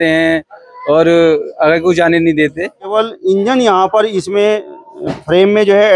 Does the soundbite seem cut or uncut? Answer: cut